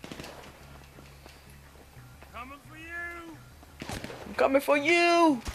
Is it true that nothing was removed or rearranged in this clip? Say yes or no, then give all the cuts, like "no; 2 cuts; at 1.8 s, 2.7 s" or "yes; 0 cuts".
no; 1 cut; at 4.2 s